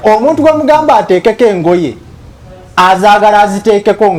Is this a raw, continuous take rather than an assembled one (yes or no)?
yes